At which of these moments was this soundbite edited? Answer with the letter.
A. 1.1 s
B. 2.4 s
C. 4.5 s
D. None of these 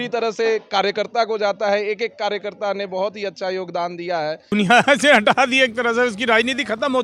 C